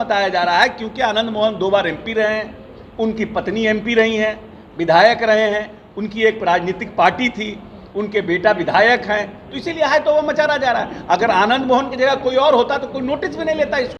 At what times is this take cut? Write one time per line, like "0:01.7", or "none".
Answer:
none